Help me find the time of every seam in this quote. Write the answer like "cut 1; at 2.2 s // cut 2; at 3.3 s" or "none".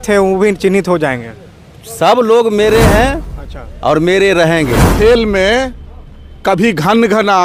cut 1; at 4.9 s